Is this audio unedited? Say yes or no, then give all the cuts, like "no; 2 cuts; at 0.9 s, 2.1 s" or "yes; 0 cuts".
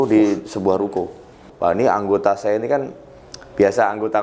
no; 1 cut; at 1.4 s